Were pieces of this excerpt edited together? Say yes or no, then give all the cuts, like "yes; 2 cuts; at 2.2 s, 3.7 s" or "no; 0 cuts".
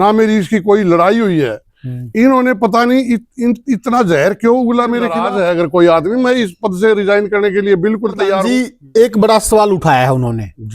yes; 2 cuts; at 5.3 s, 8.4 s